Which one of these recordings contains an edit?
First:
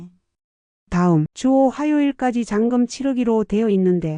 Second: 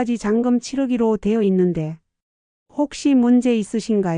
first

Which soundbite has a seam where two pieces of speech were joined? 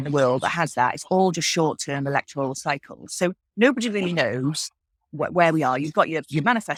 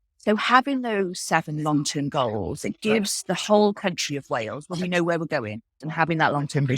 second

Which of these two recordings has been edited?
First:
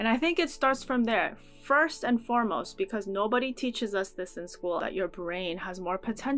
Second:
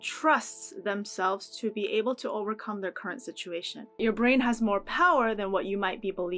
second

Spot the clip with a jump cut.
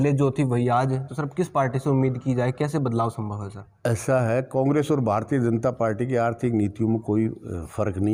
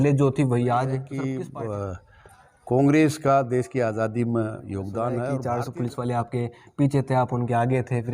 second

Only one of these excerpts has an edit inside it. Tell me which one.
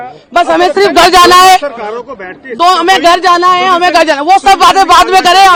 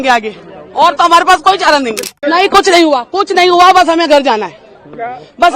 second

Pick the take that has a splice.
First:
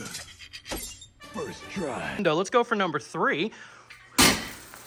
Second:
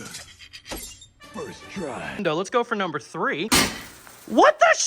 second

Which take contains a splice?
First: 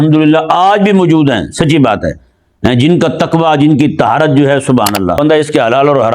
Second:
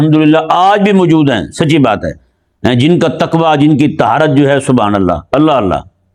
first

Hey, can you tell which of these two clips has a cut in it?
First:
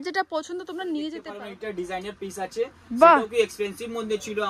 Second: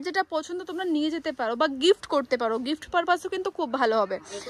first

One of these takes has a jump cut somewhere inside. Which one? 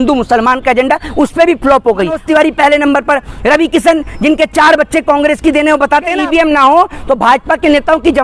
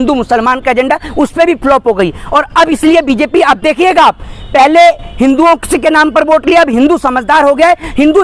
first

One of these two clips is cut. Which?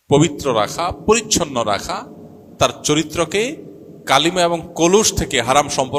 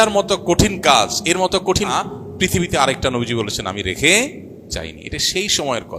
second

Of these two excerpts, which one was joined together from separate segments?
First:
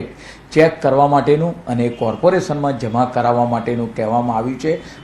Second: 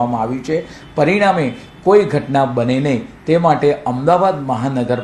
first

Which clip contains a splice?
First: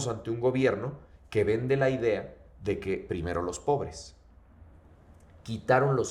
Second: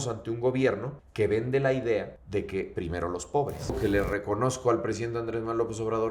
second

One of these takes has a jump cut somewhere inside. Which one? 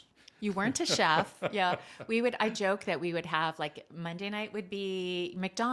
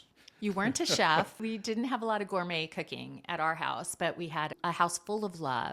second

